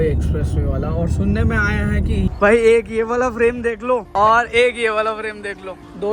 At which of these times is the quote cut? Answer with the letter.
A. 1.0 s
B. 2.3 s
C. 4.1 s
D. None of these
B